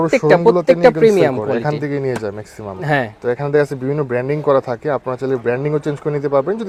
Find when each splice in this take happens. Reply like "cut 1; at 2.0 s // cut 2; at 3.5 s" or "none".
none